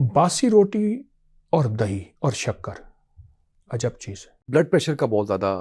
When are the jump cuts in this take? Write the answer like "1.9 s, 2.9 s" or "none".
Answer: 4.5 s